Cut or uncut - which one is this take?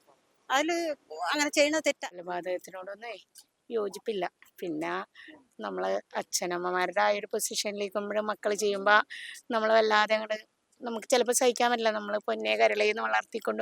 cut